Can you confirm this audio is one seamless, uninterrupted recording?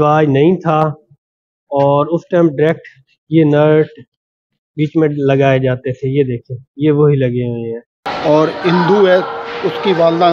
no; 1 cut; at 8.1 s

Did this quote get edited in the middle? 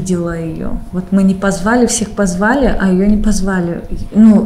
no; 0 cuts

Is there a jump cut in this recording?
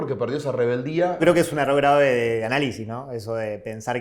yes; 1 cut; at 1.2 s

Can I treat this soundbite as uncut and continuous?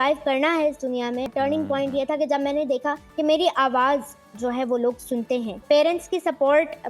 no; 3 cuts; at 1.3 s, 3.0 s, 5.6 s

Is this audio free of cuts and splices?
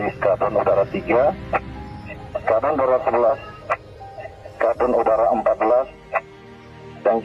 yes; 0 cuts

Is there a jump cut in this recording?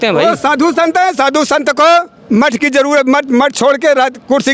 no; 0 cuts

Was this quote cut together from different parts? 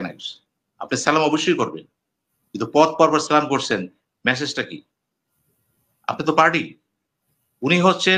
no; 0 cuts

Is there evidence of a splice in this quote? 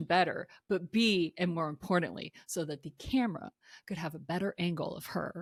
no; 0 cuts

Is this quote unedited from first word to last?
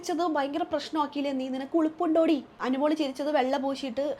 no; 1 cut; at 2.6 s

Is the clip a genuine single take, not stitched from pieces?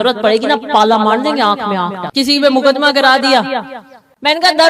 no; 1 cut; at 2.0 s

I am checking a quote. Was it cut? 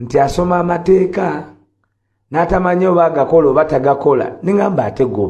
no; 0 cuts

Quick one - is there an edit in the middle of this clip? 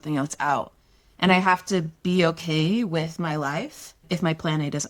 no; 0 cuts

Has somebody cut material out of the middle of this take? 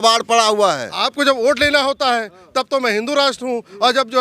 yes; 1 cut; at 1.0 s

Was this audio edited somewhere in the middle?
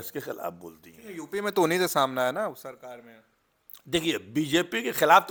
no; 0 cuts

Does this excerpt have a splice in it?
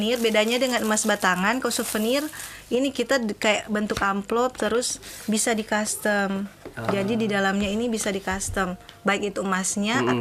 no; 0 cuts

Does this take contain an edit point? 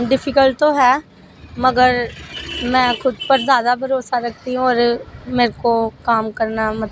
no; 0 cuts

